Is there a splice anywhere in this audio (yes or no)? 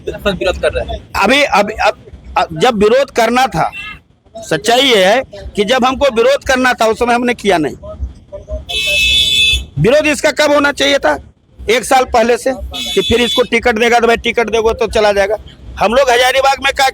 no